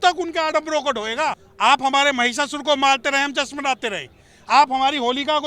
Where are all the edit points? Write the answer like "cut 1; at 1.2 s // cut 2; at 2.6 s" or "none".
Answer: cut 1; at 1.5 s